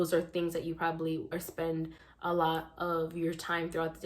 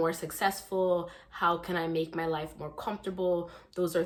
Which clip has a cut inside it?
first; 1 cut; at 1.3 s

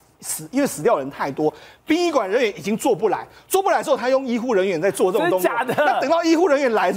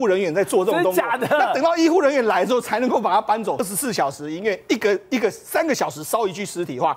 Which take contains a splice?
second; 1 cut; at 3.6 s

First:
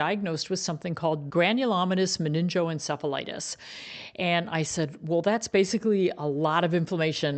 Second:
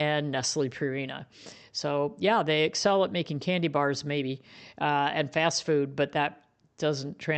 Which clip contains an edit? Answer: first; 1 cut; at 1.2 s

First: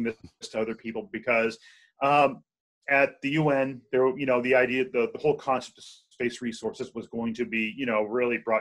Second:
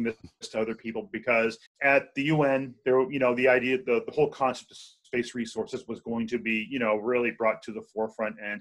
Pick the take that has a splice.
second; 1 cut; at 1.7 s

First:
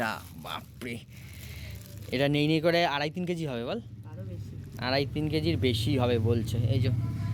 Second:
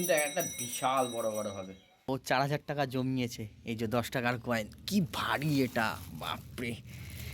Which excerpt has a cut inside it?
second; 1 cut; at 2.1 s

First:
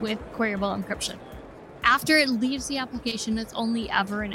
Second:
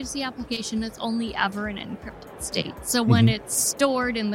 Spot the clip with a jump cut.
first; 1 cut; at 1.5 s

